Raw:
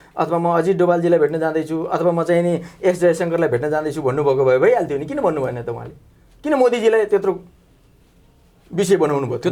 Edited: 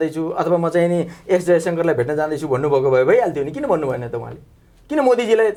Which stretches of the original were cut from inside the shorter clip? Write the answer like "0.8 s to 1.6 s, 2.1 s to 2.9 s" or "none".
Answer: none